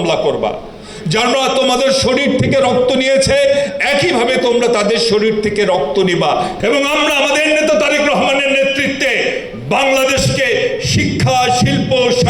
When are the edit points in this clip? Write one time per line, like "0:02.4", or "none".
0:06.5